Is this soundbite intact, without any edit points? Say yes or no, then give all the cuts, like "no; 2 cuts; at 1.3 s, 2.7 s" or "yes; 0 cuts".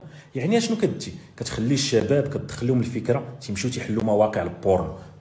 yes; 0 cuts